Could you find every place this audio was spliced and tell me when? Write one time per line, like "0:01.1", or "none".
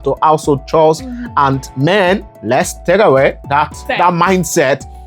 0:02.3
0:03.8